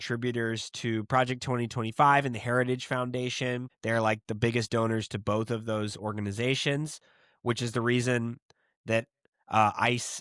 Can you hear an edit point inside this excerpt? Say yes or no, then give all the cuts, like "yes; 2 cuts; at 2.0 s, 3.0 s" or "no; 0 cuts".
yes; 1 cut; at 3.7 s